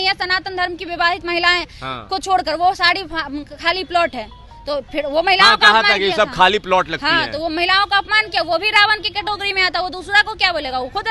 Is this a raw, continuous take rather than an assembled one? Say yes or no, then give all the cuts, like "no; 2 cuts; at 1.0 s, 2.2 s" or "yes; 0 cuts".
yes; 0 cuts